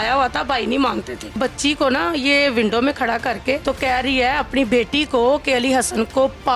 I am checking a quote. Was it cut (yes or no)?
yes